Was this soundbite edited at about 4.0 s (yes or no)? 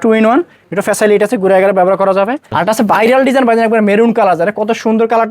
no